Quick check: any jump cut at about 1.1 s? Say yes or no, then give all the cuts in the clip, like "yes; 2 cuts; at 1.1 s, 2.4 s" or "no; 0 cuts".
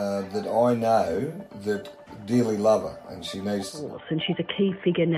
no; 1 cut; at 3.9 s